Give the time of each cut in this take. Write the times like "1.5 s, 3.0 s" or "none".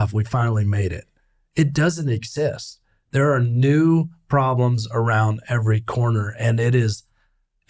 none